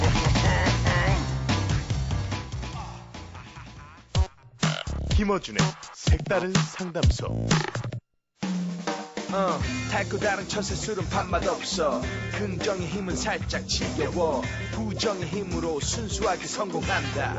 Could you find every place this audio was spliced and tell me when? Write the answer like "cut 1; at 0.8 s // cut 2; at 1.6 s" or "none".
none